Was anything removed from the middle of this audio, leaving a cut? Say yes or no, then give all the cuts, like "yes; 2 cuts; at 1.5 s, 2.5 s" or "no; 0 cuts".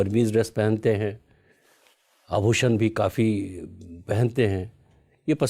no; 0 cuts